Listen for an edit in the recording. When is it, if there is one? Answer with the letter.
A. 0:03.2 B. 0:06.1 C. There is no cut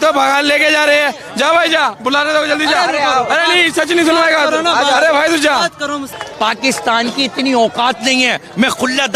B